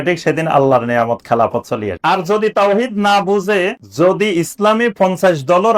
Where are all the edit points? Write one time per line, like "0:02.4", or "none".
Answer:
0:01.9
0:03.8